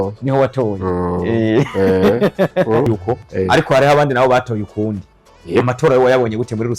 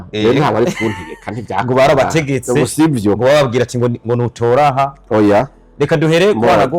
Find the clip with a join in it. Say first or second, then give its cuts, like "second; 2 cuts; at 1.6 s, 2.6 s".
first; 1 cut; at 3.0 s